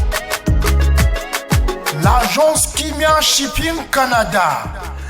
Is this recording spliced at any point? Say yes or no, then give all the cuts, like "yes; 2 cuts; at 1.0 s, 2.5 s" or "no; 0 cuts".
yes; 1 cut; at 1.9 s